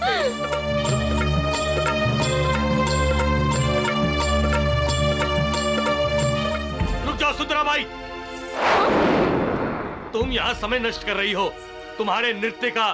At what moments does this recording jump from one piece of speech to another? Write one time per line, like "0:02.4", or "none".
none